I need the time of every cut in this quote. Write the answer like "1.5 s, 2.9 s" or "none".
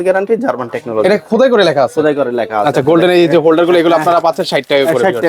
2.8 s